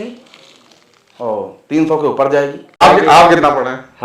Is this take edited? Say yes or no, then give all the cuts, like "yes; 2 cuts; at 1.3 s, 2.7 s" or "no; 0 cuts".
yes; 1 cut; at 2.8 s